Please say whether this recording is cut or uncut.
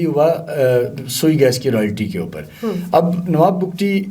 uncut